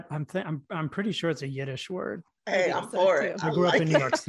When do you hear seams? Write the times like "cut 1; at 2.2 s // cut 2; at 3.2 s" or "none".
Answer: cut 1; at 2.3 s